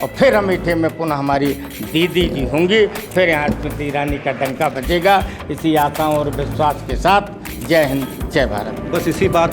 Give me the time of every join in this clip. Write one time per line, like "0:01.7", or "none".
none